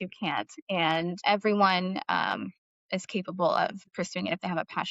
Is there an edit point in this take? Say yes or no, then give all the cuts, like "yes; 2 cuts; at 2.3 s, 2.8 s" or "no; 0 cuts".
yes; 1 cut; at 3.9 s